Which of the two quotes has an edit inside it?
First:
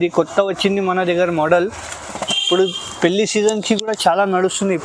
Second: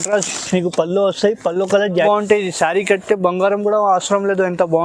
second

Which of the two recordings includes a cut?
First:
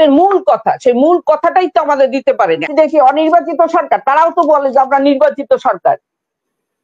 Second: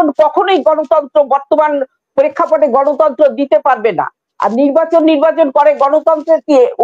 first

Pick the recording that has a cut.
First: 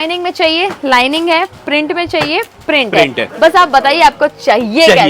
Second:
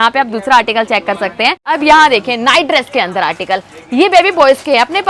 second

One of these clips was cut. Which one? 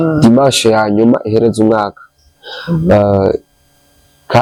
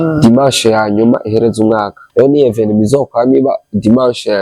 second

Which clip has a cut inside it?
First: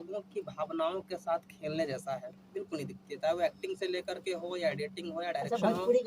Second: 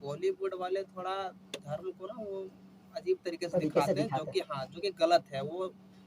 first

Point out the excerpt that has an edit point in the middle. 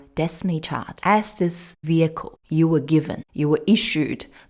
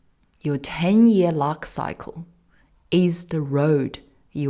first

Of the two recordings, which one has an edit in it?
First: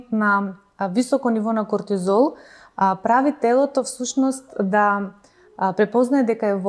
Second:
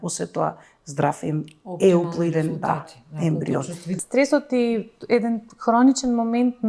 second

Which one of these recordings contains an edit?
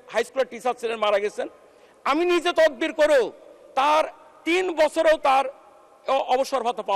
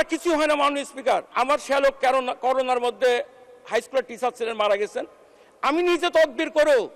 second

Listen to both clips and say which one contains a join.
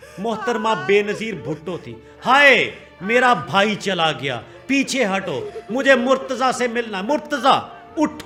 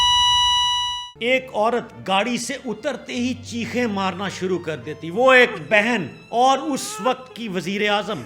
second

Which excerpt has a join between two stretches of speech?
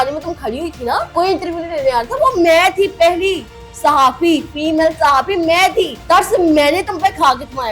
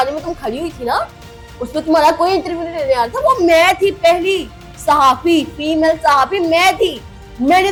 first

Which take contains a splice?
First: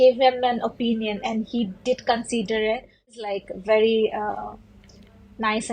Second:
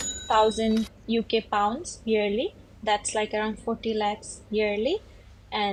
first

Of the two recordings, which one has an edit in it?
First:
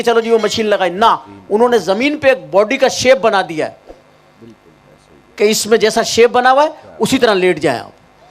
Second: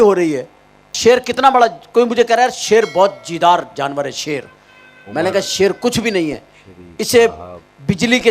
second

